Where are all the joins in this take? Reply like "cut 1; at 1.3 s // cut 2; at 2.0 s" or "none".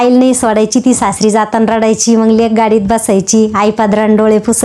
none